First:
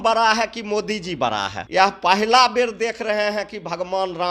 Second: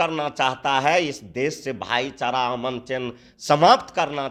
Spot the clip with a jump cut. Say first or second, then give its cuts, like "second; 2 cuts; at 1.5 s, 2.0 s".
first; 1 cut; at 1.6 s